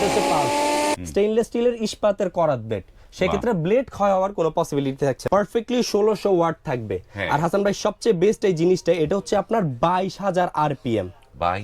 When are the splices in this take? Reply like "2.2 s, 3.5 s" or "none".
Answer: 0.9 s, 5.2 s